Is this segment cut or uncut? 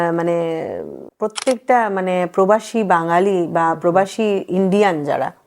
cut